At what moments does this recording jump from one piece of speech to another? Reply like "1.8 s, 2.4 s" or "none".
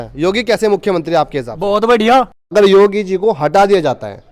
2.4 s